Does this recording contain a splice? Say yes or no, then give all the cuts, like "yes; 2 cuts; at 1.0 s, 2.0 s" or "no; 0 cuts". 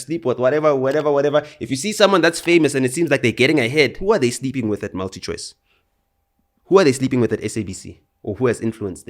yes; 1 cut; at 4.0 s